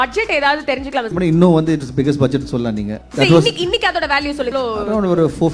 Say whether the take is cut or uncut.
cut